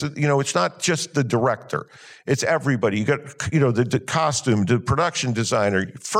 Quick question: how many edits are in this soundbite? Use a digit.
0